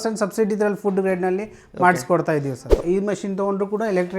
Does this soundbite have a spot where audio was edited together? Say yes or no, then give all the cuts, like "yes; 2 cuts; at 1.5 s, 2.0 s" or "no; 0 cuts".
yes; 1 cut; at 2.8 s